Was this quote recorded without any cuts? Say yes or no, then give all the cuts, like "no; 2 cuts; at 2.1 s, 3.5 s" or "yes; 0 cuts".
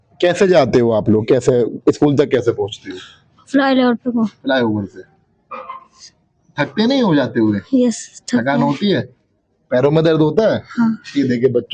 yes; 0 cuts